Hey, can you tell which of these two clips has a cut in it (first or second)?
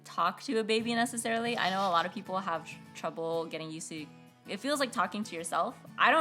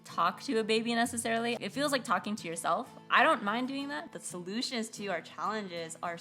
second